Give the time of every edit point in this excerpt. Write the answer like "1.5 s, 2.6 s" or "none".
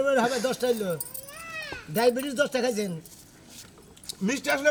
none